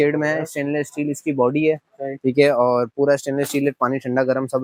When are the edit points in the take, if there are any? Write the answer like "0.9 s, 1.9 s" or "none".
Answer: none